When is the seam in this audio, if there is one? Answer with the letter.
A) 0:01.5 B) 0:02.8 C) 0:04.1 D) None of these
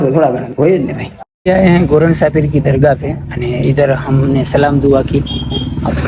A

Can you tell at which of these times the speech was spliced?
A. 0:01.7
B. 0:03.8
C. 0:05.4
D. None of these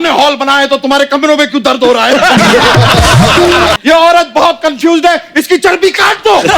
B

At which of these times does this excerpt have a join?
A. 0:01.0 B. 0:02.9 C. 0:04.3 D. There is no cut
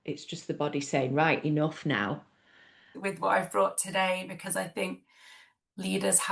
B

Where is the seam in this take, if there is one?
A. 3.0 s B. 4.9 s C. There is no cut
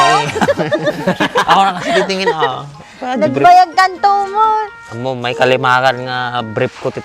C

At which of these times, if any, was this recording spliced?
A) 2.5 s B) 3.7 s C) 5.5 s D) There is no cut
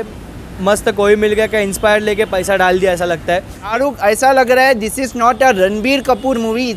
B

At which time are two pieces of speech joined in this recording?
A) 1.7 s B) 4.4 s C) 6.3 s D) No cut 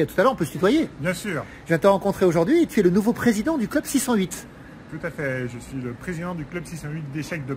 D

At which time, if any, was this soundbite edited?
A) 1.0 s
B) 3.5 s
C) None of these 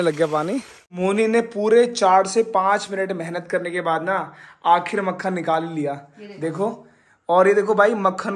A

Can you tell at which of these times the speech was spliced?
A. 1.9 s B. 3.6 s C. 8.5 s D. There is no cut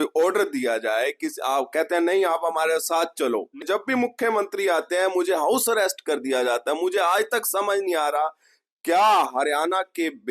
B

